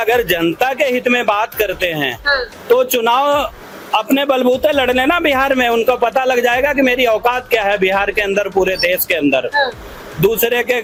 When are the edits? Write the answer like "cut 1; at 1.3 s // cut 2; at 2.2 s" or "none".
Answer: none